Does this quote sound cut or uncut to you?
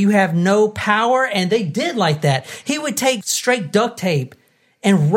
cut